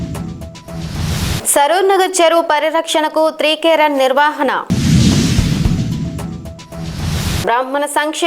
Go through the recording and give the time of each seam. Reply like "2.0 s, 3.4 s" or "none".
1.4 s